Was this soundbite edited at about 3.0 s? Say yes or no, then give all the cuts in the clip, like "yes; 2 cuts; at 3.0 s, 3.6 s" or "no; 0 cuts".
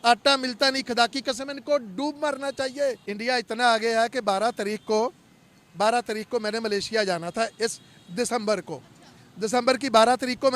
yes; 1 cut; at 3.0 s